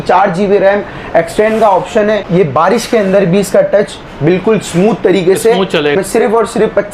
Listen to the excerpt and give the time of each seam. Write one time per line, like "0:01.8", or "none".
0:02.3
0:05.9